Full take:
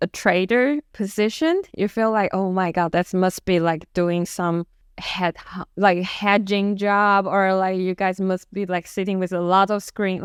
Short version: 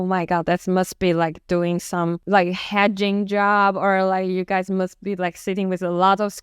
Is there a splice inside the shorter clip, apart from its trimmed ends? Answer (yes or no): yes